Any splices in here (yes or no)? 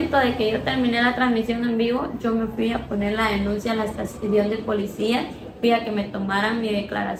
no